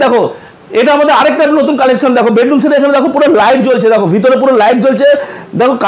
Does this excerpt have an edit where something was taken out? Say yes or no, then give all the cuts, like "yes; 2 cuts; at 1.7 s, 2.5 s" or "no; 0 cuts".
no; 0 cuts